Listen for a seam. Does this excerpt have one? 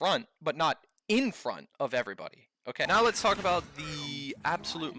yes; 1 cut; at 2.9 s

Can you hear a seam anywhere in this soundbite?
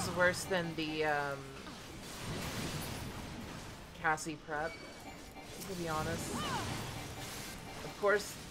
yes; 1 cut; at 7.6 s

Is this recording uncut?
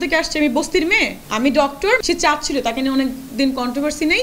no; 2 cuts; at 1.2 s, 2.0 s

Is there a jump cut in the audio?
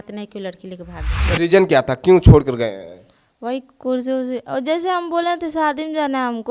yes; 1 cut; at 1.0 s

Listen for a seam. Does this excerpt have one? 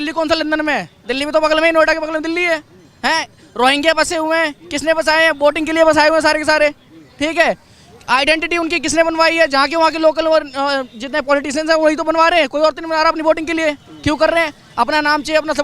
no; 0 cuts

